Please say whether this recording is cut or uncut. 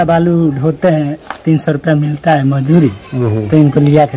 uncut